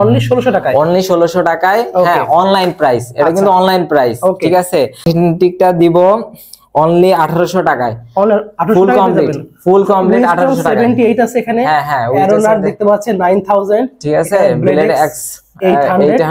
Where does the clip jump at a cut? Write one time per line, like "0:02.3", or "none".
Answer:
0:05.0